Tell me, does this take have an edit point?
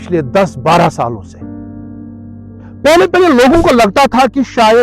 no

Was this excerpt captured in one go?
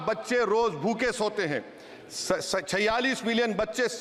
yes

